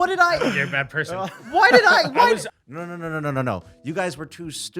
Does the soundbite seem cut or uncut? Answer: cut